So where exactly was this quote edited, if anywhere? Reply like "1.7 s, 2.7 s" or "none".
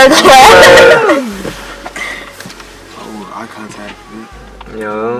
none